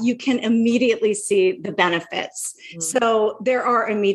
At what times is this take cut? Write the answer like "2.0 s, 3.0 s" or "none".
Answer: none